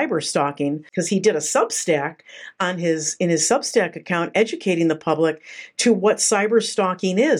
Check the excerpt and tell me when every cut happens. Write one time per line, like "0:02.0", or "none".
0:00.9